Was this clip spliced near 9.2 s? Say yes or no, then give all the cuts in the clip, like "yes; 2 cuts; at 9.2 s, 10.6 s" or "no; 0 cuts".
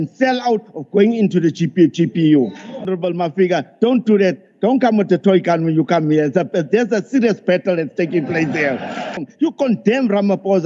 yes; 2 cuts; at 2.9 s, 9.2 s